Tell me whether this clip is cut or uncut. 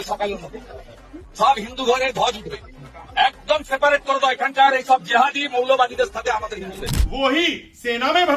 cut